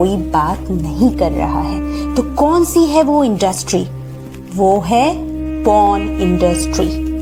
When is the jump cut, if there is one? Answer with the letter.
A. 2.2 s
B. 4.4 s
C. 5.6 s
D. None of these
D